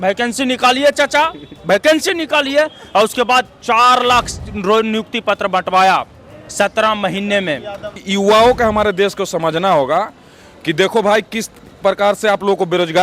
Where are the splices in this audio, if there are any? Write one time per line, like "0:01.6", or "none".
0:08.0